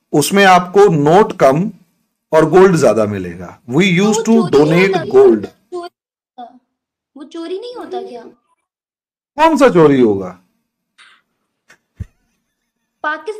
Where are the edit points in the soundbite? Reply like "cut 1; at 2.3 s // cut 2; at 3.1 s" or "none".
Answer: none